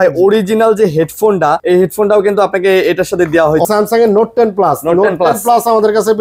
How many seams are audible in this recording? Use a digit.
2